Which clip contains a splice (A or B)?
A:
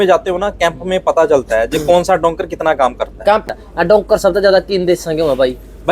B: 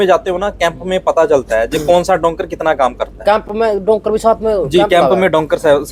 A